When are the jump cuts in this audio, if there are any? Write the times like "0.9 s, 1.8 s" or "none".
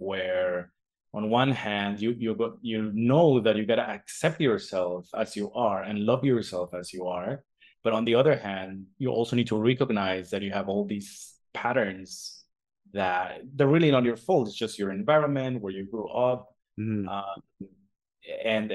none